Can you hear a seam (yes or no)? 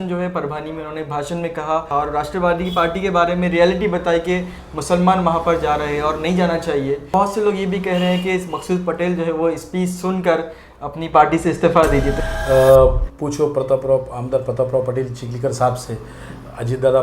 yes